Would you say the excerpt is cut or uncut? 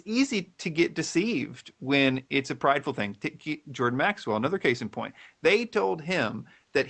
uncut